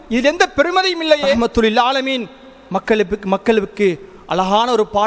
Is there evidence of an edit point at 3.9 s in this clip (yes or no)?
no